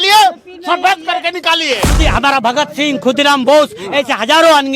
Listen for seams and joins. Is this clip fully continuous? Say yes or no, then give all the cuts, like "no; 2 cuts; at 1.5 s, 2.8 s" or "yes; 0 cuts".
no; 1 cut; at 1.9 s